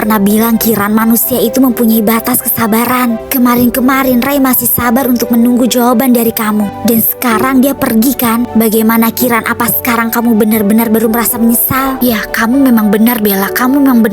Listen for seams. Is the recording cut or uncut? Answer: cut